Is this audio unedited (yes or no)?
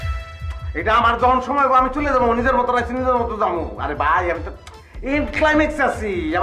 yes